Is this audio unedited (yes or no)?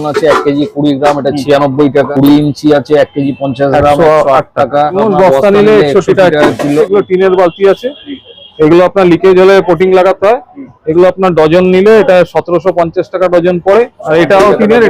no